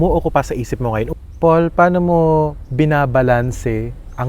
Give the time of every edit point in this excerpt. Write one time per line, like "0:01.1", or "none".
0:01.1